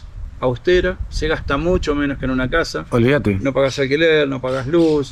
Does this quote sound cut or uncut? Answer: uncut